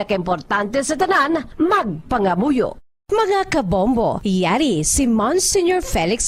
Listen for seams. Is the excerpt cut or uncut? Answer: cut